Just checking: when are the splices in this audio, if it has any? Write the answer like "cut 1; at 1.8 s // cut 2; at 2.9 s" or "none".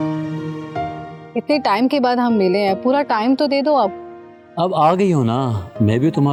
none